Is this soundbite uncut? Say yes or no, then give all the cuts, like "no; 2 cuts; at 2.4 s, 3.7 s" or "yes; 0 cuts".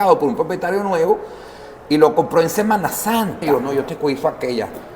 no; 1 cut; at 3.4 s